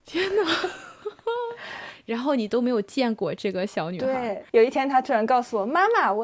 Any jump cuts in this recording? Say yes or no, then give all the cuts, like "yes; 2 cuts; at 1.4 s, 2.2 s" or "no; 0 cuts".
yes; 1 cut; at 4.4 s